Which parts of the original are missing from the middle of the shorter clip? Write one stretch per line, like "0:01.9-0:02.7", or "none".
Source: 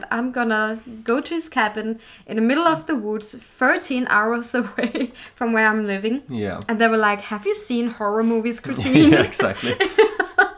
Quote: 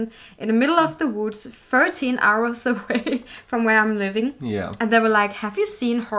none

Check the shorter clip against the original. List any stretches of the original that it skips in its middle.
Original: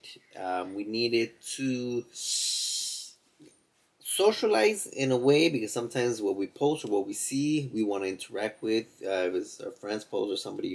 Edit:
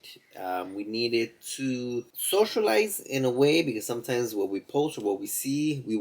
0:02.2-0:04.0

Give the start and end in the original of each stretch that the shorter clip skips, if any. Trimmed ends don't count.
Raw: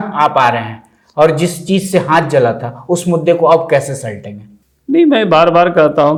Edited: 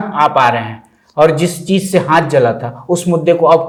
none

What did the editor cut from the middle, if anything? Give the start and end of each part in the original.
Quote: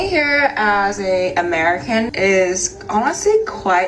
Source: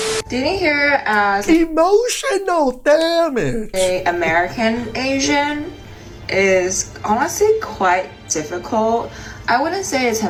0:01.4-0:03.6
0:04.8-0:06.3

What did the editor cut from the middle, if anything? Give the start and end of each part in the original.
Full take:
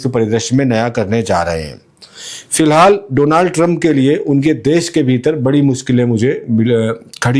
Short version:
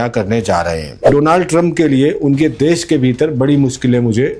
0:01.8-0:03.1

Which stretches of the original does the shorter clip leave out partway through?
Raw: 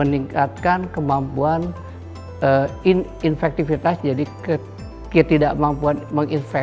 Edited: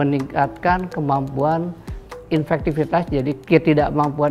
0:02.2-0:03.1
0:04.3-0:05.0

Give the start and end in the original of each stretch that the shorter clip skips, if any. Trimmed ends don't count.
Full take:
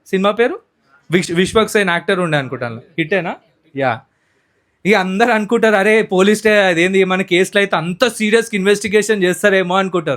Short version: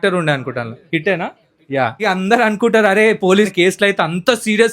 0:04.1-0:04.9
0:06.4-0:07.2

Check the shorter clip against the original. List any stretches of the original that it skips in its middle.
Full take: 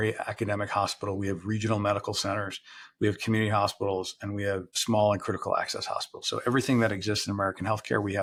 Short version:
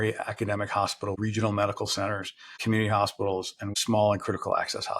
0:01.2-0:01.4
0:02.9-0:03.2
0:04.3-0:04.7

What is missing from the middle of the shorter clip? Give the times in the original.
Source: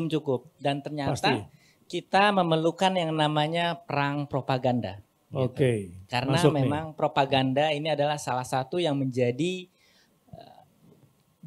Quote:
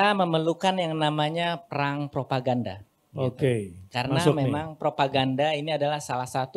none

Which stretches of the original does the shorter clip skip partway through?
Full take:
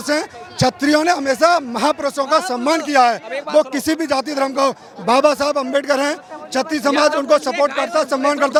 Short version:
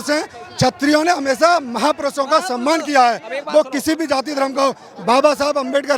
none

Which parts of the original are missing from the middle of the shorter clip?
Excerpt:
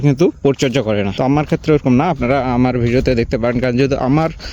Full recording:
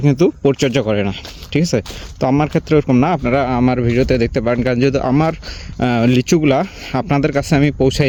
0:01.1-0:02.2

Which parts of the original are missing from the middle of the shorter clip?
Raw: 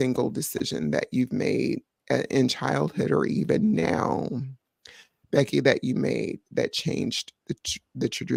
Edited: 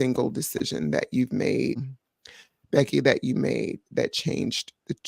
0:01.9-0:04.5

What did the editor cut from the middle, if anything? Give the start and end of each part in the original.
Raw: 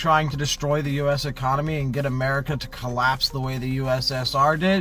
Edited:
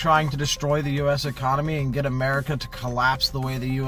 none

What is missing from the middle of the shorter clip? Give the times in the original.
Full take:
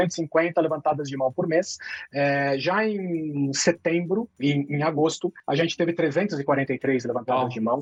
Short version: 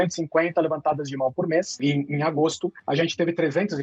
0:01.7-0:04.3

